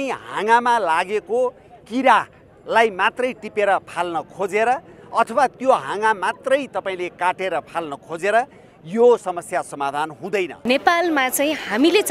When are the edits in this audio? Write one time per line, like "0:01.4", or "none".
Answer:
0:10.6